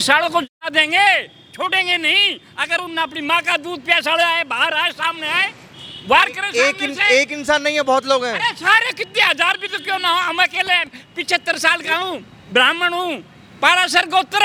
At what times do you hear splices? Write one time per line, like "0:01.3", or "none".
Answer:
none